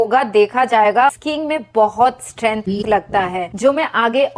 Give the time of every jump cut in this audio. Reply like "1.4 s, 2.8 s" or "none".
1.2 s